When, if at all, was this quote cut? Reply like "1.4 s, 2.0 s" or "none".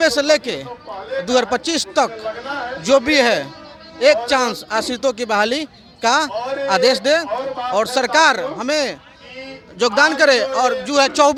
none

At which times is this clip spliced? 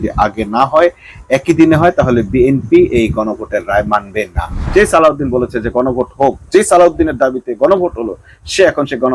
4.6 s

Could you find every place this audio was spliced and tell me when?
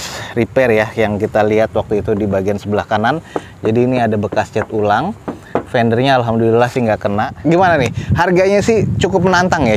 7.3 s

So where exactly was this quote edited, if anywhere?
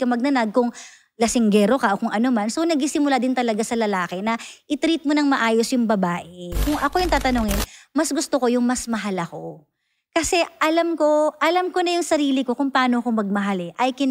6.6 s

